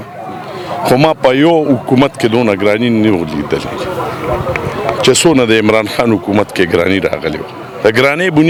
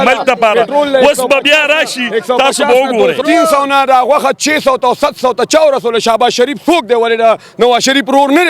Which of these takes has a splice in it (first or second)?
second